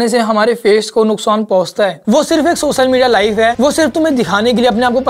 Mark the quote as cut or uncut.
cut